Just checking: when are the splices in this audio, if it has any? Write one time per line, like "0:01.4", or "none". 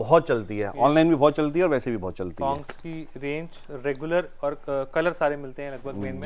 none